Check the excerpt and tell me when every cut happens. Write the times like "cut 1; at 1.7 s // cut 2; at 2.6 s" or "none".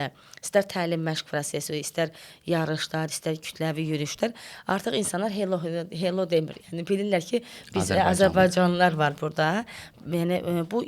none

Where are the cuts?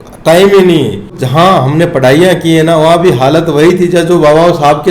cut 1; at 1.2 s

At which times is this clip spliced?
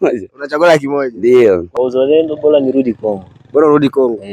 cut 1; at 1.7 s

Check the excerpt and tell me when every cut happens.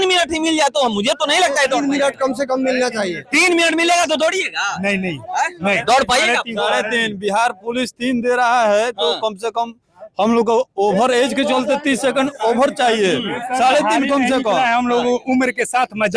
none

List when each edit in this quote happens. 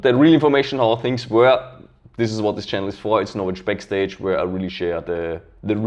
none

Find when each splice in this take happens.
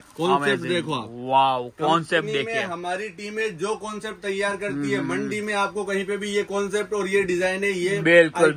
none

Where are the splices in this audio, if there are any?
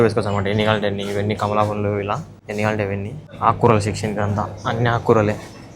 cut 1; at 2.3 s // cut 2; at 3.2 s

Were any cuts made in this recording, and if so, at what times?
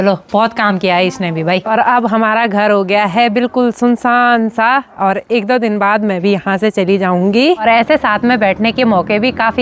cut 1; at 1.6 s // cut 2; at 7.6 s

